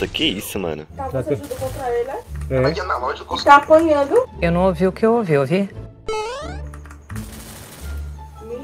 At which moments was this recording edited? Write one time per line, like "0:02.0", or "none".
none